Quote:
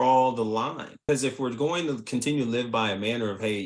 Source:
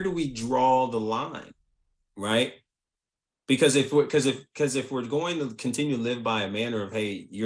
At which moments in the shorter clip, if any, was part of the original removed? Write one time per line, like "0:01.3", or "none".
0:00.9